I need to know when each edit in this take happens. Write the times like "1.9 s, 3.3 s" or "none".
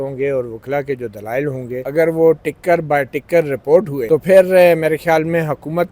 1.8 s, 4.0 s